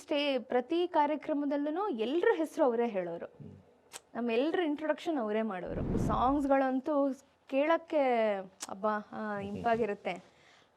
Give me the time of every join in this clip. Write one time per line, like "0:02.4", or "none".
0:06.0